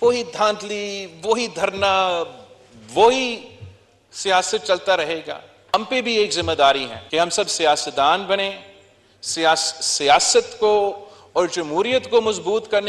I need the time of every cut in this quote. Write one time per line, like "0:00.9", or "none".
0:05.7
0:06.9